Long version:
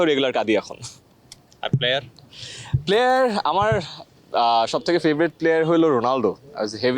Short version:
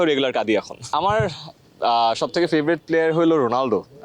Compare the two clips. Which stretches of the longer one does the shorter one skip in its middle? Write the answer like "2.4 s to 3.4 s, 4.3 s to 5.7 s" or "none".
0.9 s to 3.4 s